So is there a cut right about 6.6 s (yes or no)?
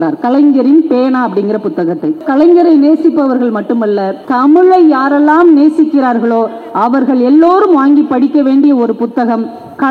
no